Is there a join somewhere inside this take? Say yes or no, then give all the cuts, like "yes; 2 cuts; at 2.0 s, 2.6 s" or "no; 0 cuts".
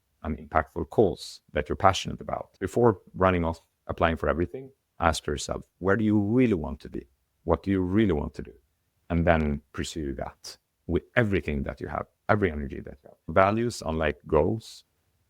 yes; 2 cuts; at 2.5 s, 13.3 s